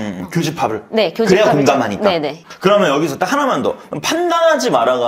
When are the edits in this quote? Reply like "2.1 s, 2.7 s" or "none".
2.4 s